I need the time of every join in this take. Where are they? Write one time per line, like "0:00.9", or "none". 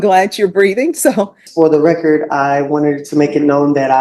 0:01.4